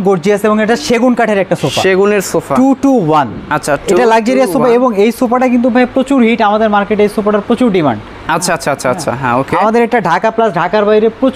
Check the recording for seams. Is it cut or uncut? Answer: uncut